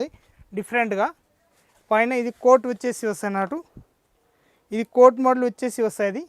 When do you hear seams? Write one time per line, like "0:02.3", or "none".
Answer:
none